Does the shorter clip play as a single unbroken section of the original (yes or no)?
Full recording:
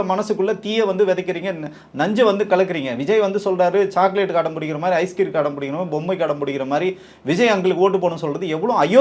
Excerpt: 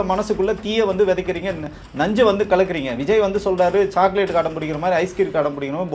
yes